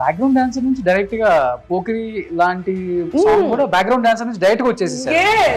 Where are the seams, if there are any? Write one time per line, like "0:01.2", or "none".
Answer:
none